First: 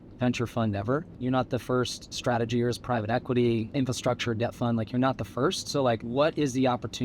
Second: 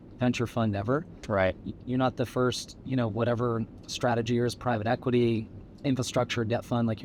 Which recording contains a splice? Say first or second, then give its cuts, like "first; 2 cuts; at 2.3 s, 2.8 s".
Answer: first; 4 cuts; at 1.1 s, 2.0 s, 3.7 s, 6.0 s